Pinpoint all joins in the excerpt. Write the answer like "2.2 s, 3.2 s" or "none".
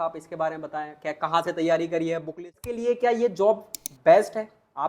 2.6 s